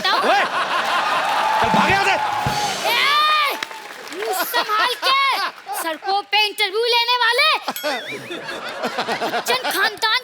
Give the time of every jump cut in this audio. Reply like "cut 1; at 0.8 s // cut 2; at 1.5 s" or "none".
cut 1; at 2.8 s // cut 2; at 5.6 s

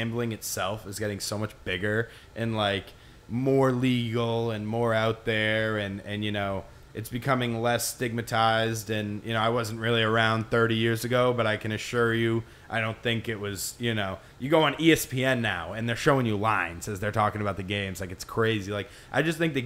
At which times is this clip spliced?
none

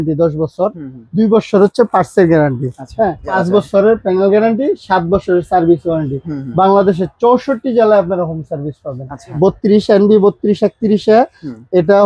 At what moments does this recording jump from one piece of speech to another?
cut 1; at 3.3 s // cut 2; at 9.4 s

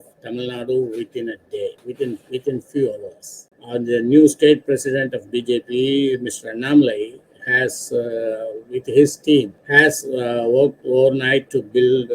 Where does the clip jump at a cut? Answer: cut 1; at 1.8 s // cut 2; at 3.5 s // cut 3; at 9.6 s

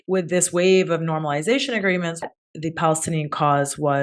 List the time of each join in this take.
cut 1; at 2.3 s

